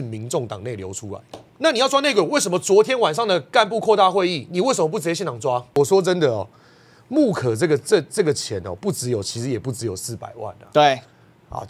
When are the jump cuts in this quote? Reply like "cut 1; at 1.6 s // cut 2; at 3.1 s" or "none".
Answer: cut 1; at 1.4 s // cut 2; at 5.8 s